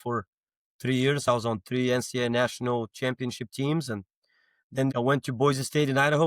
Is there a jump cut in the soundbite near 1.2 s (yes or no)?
no